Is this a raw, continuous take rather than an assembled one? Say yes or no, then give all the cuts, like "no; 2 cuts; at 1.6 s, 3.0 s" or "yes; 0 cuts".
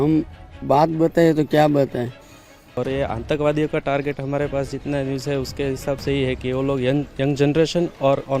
no; 1 cut; at 2.8 s